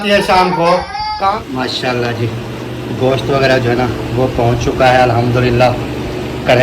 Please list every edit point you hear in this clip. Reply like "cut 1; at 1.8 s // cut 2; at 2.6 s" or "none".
cut 1; at 1.4 s